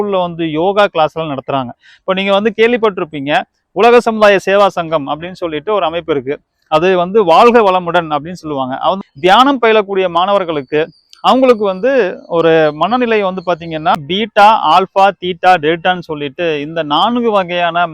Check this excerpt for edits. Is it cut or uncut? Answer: cut